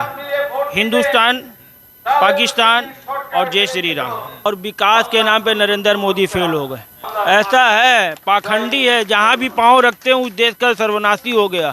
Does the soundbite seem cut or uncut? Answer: cut